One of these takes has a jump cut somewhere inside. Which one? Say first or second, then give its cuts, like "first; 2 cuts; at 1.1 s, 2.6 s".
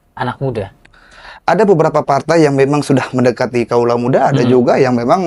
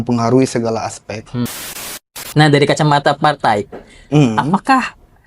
second; 1 cut; at 2.1 s